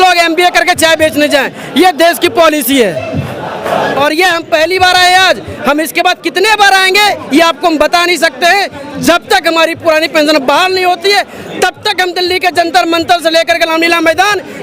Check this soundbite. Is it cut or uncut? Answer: uncut